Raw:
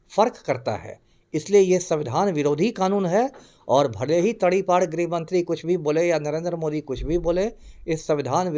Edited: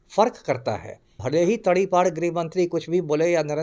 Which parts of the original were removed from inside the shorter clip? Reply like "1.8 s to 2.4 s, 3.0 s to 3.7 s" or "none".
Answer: 1.2 s to 4.0 s